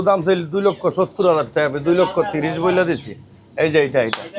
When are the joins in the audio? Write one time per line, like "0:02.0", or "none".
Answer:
none